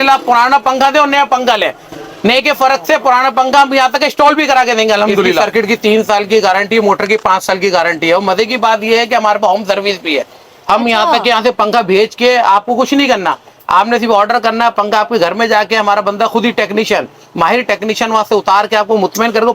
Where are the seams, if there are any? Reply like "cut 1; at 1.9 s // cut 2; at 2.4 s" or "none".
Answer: cut 1; at 5.4 s